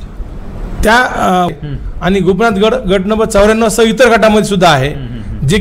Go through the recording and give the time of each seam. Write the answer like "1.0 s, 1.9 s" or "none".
1.5 s